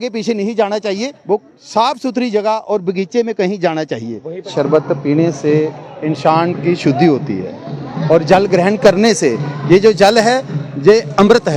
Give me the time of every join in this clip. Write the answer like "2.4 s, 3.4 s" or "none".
4.5 s